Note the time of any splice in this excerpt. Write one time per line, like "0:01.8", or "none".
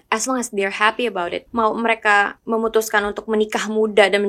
0:01.4
0:02.4